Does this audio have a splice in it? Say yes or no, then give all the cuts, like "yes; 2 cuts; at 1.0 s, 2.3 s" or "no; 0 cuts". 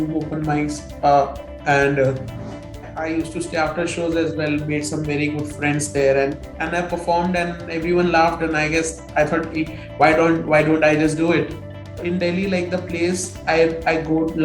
yes; 3 cuts; at 2.9 s, 6.4 s, 12.0 s